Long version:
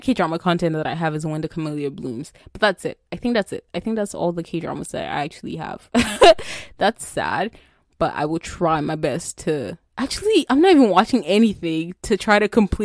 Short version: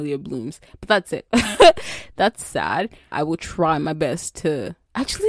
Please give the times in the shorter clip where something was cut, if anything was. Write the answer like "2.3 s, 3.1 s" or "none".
1.2 s, 3.1 s